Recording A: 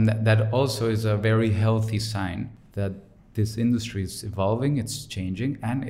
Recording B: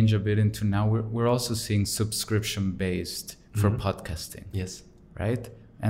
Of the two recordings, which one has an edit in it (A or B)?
A